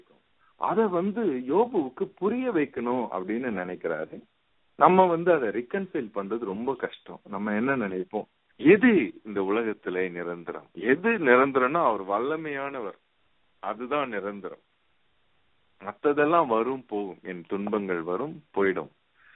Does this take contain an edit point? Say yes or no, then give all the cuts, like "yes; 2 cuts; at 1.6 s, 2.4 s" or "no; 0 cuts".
yes; 1 cut; at 8.4 s